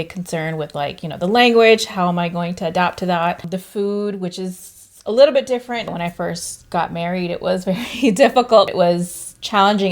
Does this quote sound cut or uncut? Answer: cut